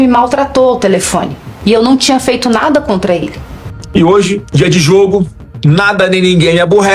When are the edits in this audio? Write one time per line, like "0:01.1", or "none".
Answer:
0:03.8